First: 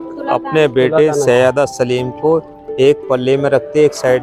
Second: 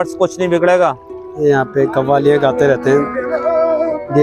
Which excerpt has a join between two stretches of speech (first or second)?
second